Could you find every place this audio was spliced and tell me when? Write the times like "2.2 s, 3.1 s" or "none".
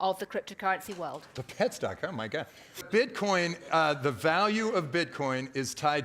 1.3 s, 2.8 s